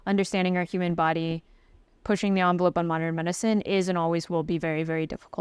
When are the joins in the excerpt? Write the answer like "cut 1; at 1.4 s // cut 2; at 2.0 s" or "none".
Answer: none